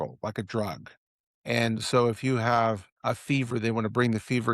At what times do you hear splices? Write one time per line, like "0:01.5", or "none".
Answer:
0:02.9